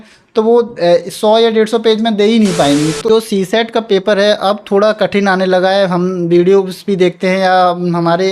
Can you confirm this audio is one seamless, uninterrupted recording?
no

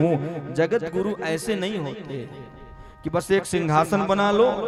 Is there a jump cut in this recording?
no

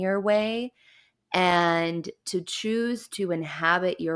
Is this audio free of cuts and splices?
yes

